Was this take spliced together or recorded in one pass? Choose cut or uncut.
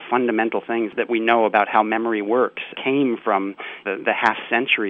cut